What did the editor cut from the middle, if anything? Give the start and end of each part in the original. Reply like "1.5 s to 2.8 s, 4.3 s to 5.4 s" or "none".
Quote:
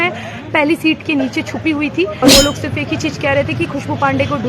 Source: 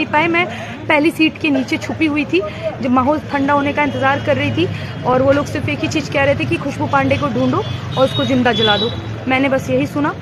2.6 s to 5.1 s